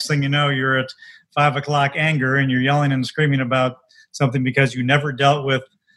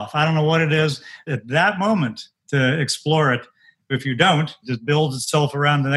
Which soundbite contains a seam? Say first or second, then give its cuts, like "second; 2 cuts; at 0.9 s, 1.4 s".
second; 3 cuts; at 1.3 s, 3.9 s, 4.7 s